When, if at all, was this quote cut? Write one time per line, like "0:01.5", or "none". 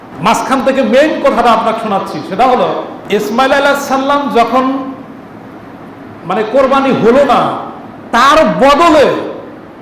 0:02.9